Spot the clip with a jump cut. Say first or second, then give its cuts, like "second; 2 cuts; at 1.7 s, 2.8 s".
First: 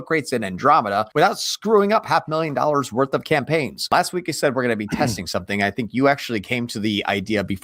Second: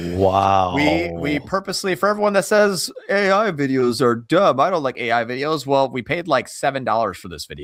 first; 2 cuts; at 1.1 s, 3.8 s